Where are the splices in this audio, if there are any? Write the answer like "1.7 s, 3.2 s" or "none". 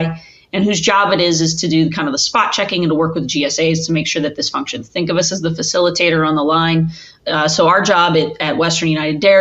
7.1 s

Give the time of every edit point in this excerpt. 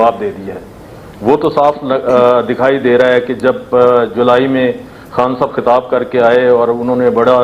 none

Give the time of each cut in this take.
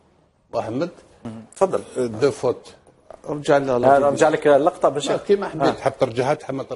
none

